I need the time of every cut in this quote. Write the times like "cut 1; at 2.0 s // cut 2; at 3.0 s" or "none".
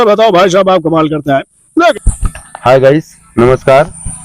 cut 1; at 1.8 s